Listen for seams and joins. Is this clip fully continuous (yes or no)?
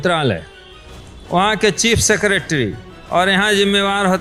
yes